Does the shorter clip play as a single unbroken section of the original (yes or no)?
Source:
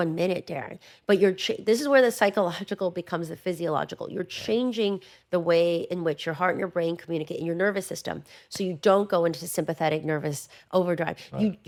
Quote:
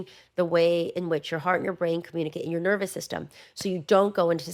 yes